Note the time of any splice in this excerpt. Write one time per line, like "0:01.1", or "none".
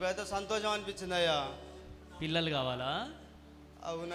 none